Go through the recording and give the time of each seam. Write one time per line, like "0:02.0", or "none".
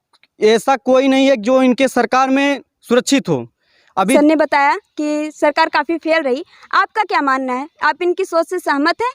0:04.1